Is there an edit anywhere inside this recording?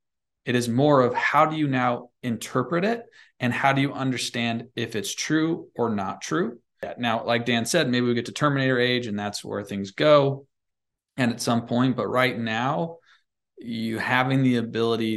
yes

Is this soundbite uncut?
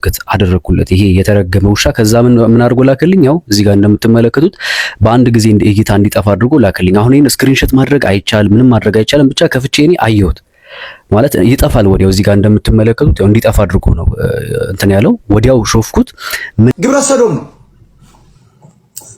no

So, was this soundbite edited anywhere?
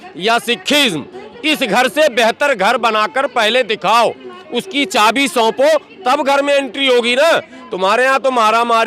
no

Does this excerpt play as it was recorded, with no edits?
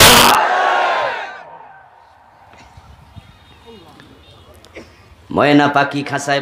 yes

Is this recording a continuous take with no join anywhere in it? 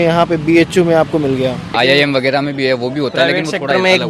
no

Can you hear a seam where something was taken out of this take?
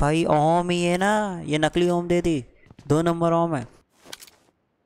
yes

